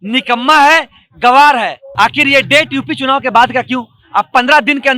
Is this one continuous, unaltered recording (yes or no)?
no